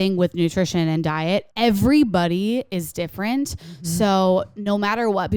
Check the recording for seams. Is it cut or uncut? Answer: cut